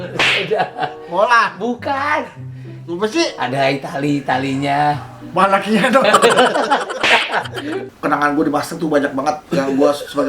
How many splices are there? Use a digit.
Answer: 1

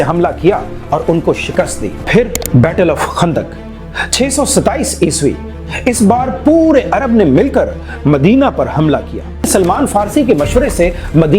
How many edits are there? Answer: 2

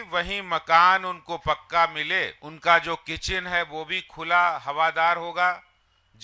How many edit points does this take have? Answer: 1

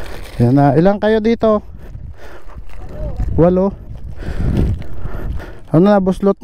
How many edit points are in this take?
1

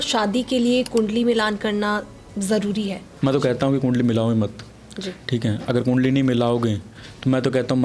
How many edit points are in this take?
0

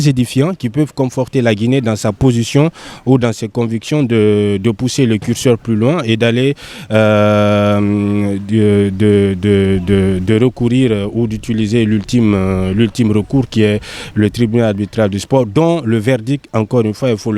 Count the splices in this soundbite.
0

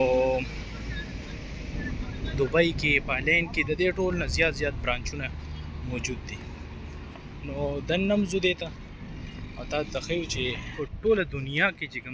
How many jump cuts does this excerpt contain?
1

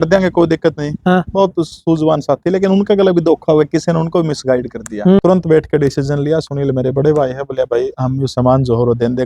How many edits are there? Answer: 1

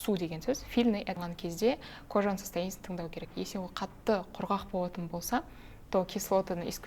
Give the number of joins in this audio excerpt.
1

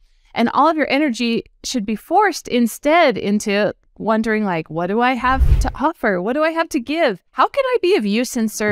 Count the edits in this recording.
1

